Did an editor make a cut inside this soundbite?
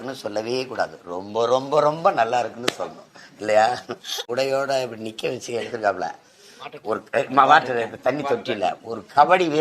yes; 1 cut; at 4.3 s

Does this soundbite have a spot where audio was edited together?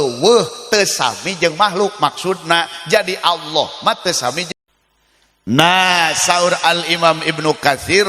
yes; 1 cut; at 4.5 s

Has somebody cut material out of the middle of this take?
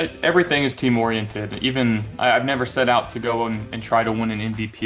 no; 0 cuts

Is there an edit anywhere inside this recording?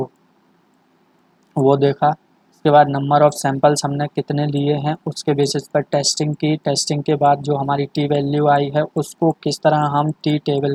no; 0 cuts

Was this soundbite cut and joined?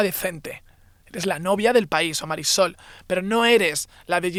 no; 0 cuts

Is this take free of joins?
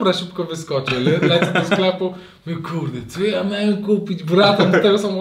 yes; 0 cuts

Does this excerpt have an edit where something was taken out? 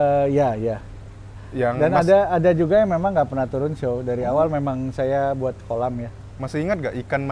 no; 0 cuts

